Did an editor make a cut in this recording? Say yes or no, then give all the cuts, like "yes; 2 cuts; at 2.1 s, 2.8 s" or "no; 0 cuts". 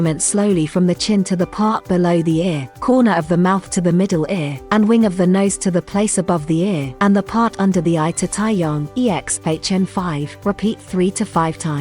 yes; 5 cuts; at 2.7 s, 4.5 s, 6.9 s, 8.9 s, 10.3 s